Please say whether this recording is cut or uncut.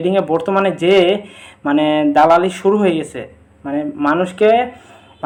uncut